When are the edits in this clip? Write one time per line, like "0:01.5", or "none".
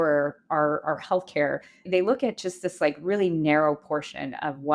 0:01.9